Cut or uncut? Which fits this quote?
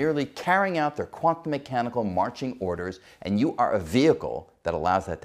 uncut